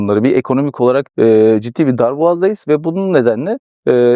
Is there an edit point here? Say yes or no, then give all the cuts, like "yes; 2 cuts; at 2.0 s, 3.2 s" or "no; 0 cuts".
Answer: no; 0 cuts